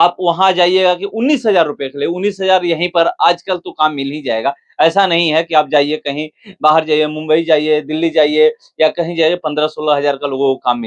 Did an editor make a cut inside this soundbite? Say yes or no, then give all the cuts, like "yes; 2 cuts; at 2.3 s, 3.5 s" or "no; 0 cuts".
no; 0 cuts